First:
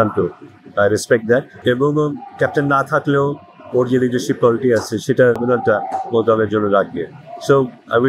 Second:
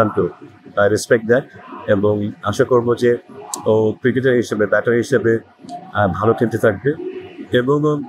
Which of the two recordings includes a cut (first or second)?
first